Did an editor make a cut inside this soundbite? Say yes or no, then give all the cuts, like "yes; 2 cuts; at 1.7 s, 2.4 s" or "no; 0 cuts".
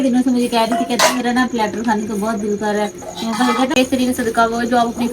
yes; 1 cut; at 3.8 s